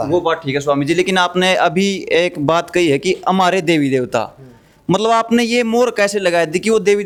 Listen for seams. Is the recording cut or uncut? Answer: uncut